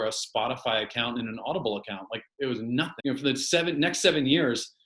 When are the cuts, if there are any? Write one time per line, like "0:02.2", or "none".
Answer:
0:02.9